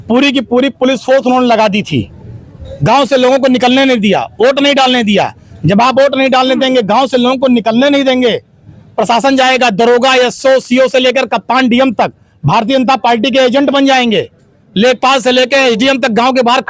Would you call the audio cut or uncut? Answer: uncut